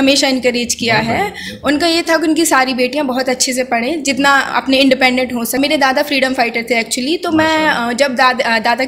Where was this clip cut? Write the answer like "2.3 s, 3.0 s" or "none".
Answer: 5.6 s